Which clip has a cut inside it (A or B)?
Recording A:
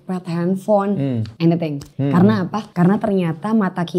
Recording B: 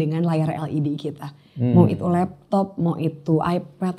A